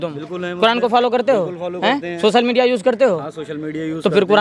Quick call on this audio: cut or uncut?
uncut